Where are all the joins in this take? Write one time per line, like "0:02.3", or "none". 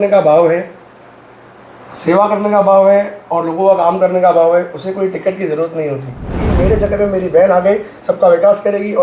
0:06.4